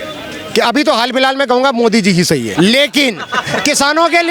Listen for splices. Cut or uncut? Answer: cut